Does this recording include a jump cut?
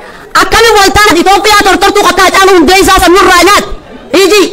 yes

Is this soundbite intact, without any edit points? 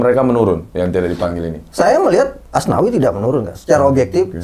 yes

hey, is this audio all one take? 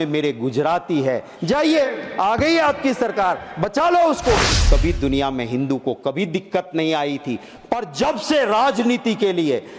no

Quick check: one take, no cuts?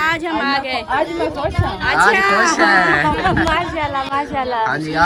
yes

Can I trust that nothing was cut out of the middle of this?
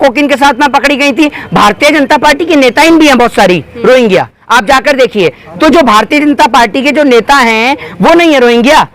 yes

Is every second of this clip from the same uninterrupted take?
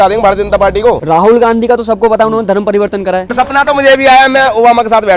no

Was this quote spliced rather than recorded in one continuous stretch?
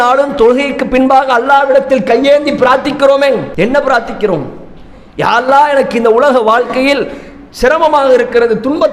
no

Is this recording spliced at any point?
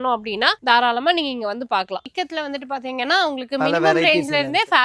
yes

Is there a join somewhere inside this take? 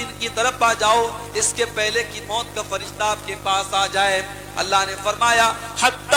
no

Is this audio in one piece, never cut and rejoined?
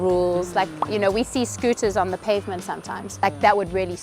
no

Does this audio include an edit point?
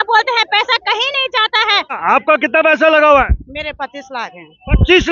yes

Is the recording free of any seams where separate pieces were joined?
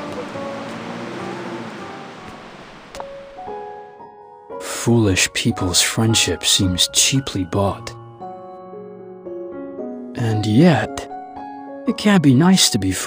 yes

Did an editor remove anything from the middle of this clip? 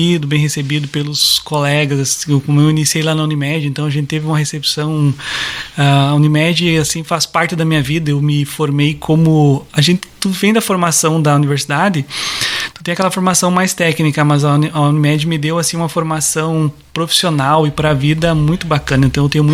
no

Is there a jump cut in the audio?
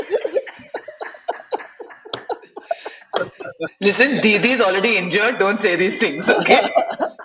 no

